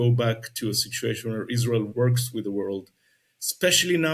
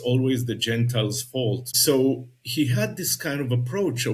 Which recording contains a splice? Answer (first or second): second